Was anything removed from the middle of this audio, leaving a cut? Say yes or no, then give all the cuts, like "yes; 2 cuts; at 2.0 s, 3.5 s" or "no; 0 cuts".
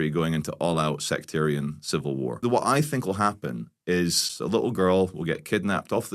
yes; 2 cuts; at 2.4 s, 4.3 s